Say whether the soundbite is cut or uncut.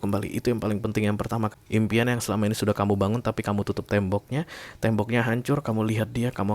cut